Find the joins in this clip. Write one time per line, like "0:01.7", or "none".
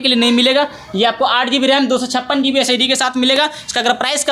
none